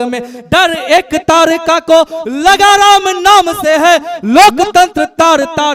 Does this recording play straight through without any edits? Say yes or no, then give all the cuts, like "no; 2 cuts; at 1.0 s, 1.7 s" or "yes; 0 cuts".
yes; 0 cuts